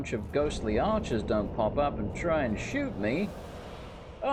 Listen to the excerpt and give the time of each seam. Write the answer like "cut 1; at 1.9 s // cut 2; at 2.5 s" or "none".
none